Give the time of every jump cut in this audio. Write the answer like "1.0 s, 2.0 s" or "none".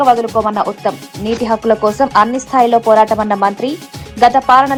none